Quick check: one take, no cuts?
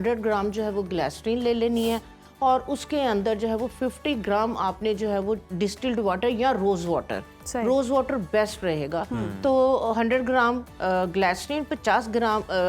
yes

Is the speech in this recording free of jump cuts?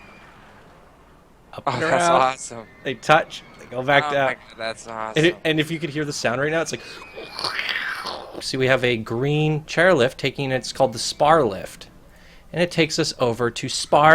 no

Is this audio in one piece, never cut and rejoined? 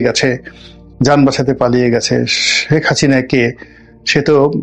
yes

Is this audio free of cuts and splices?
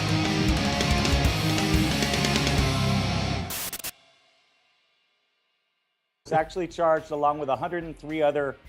yes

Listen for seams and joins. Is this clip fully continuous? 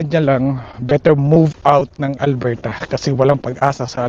yes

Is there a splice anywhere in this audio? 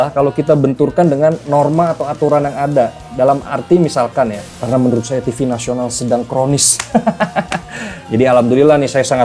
yes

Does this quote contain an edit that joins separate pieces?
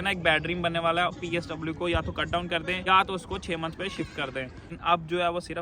yes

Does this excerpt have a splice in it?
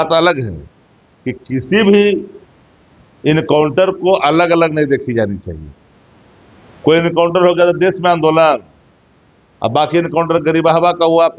no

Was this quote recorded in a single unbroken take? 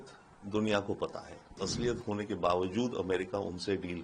no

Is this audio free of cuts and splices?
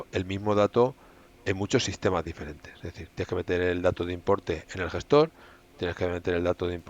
yes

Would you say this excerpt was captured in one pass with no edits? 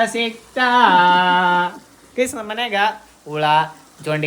yes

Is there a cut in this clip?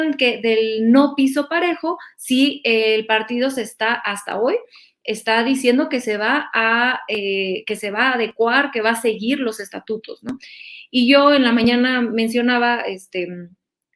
no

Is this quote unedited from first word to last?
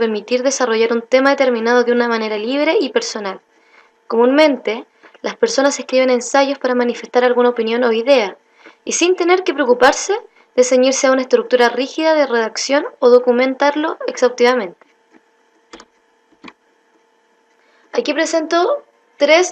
yes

